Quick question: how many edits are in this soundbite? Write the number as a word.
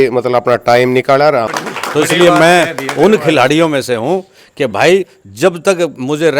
one